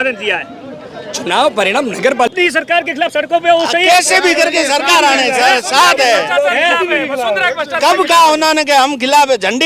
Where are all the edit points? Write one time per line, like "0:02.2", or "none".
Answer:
0:02.3